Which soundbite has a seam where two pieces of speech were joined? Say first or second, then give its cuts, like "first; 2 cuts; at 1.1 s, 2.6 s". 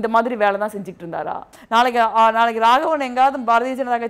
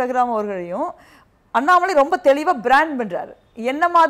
first; 1 cut; at 1.5 s